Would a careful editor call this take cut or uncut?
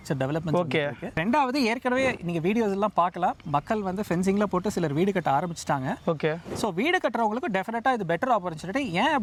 uncut